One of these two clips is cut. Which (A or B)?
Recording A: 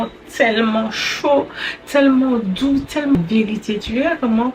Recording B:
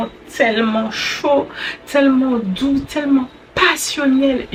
A